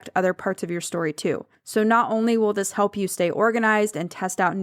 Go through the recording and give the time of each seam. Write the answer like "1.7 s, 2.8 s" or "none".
1.5 s